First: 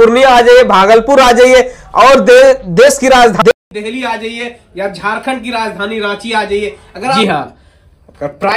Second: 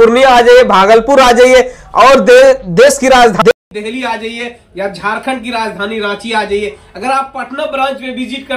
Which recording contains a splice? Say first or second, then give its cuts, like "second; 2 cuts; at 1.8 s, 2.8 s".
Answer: first; 1 cut; at 7.2 s